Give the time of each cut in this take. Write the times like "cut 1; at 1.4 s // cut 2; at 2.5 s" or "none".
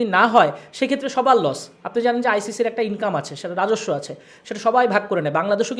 none